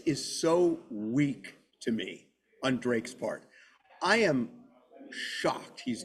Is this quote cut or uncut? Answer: uncut